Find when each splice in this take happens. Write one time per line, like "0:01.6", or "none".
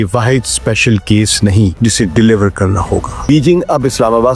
0:01.8
0:03.2